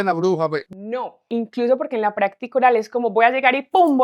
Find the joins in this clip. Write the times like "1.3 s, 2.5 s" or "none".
1.3 s